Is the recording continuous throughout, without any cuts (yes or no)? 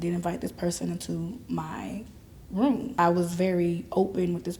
no